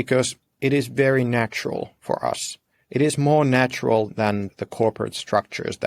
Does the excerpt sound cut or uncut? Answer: cut